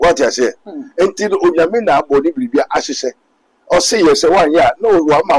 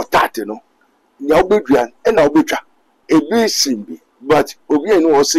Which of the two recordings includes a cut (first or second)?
second